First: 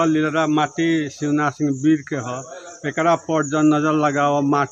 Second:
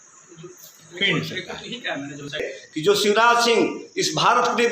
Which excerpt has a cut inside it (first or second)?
second